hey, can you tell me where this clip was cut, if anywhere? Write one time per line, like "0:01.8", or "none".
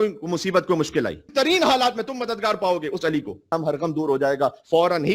0:01.2
0:03.4